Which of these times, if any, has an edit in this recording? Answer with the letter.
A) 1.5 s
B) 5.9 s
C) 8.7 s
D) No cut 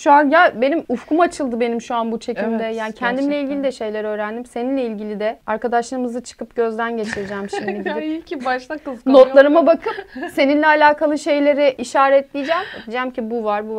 D